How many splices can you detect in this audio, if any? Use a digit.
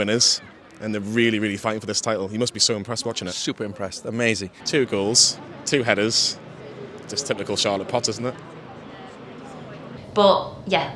2